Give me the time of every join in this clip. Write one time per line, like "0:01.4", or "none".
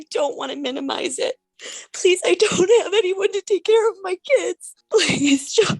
0:01.5
0:04.7